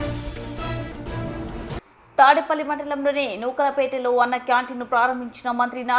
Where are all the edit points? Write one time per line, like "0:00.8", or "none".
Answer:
none